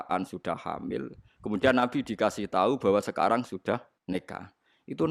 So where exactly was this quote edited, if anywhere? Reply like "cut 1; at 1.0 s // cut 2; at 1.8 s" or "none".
cut 1; at 3.9 s